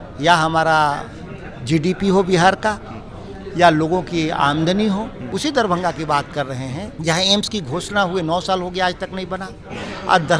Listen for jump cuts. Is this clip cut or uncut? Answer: cut